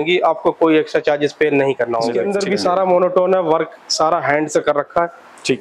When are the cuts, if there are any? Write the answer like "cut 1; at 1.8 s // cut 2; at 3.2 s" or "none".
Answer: cut 1; at 2.2 s

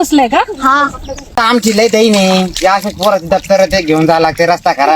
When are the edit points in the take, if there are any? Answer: cut 1; at 1.4 s

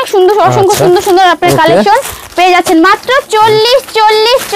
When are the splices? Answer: none

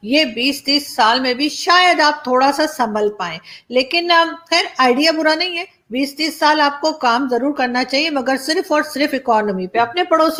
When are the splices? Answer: none

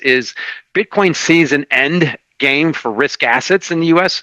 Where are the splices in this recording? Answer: none

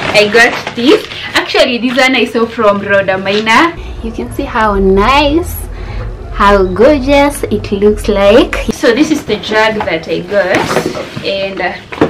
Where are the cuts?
cut 1; at 3.8 s // cut 2; at 8.6 s

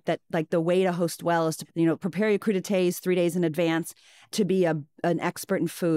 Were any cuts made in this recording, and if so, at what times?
cut 1; at 1.6 s // cut 2; at 4.3 s

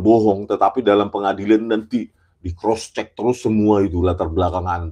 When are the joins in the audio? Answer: none

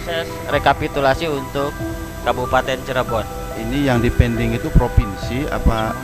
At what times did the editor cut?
cut 1; at 3.5 s

